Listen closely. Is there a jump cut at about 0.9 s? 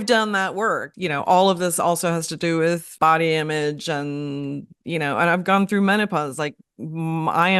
yes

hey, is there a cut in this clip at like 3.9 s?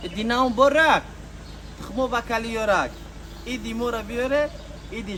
no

